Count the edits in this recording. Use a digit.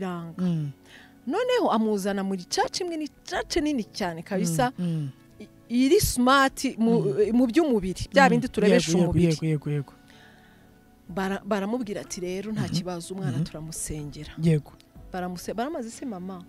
0